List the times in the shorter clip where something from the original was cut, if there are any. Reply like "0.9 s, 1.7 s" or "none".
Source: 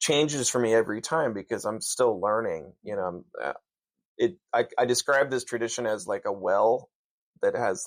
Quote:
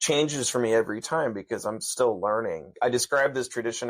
2.7 s